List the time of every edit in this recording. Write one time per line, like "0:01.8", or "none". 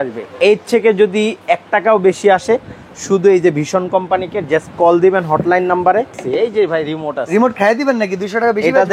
0:06.2

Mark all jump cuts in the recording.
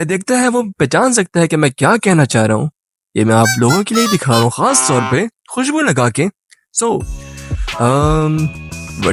none

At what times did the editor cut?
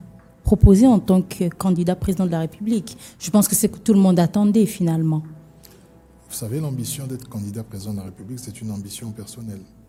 none

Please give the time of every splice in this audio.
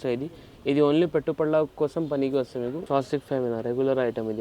0:02.8

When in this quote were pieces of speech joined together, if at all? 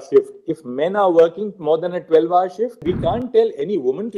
0:02.8

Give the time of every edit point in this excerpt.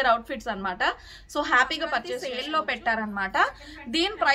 0:02.3

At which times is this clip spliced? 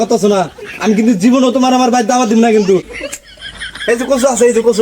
0:02.9

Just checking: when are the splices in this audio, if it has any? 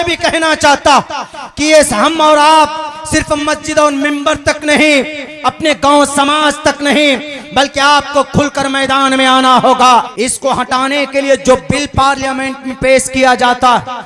0:10.1

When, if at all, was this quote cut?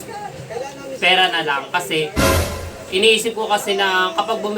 0:02.1
0:02.8

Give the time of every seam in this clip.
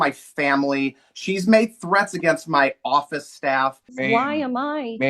0:03.9

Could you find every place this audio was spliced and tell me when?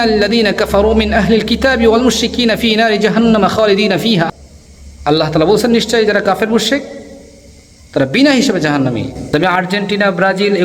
0:04.3
0:09.2

